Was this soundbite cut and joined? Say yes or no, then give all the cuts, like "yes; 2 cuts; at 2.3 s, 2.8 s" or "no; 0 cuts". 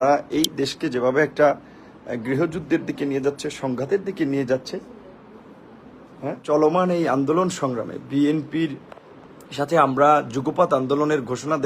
yes; 1 cut; at 6.4 s